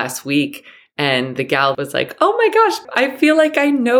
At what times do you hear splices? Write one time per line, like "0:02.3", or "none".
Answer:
0:01.7
0:02.8